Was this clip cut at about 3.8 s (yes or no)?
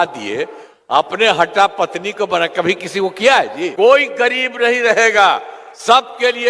yes